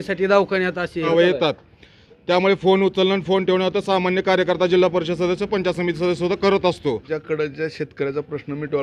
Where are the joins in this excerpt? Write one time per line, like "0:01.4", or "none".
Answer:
0:01.1
0:07.1